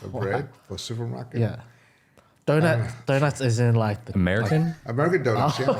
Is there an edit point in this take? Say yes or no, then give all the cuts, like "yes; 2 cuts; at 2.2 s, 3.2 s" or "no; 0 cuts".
no; 0 cuts